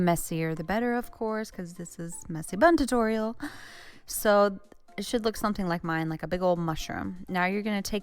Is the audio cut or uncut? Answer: cut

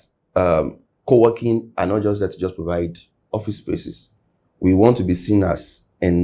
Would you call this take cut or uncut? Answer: uncut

